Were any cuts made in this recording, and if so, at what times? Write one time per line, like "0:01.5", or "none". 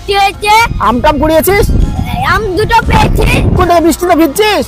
0:03.6